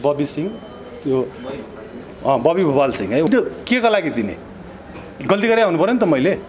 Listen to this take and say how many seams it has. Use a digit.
1